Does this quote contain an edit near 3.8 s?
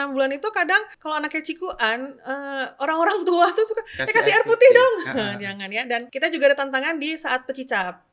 no; 2 cuts; at 0.9 s, 6.0 s

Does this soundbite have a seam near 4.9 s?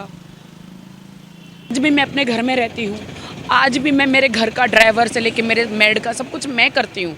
no; 1 cut; at 1.7 s

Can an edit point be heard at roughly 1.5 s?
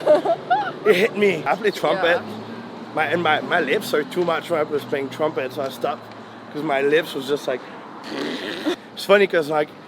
yes; 2 cuts; at 1.5 s, 8.8 s

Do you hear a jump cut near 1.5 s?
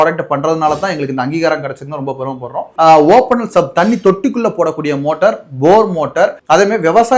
no; 1 cut; at 2.7 s

